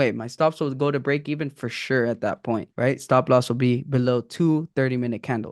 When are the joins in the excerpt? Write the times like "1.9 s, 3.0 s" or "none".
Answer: 2.7 s